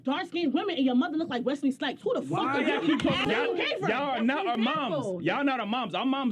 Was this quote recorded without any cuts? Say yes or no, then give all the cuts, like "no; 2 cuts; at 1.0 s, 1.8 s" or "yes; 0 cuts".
no; 1 cut; at 3.3 s